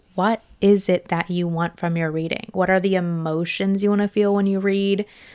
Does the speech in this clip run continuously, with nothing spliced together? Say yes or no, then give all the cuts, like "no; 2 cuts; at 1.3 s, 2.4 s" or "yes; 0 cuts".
yes; 0 cuts